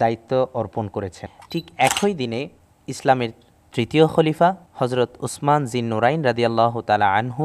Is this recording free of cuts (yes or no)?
no